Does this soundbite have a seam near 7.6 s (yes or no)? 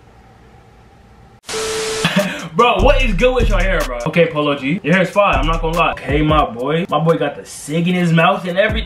no